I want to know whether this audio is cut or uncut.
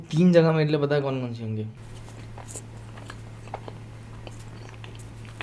cut